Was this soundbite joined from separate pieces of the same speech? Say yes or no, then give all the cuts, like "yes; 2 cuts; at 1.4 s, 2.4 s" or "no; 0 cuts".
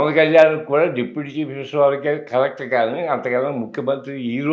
no; 0 cuts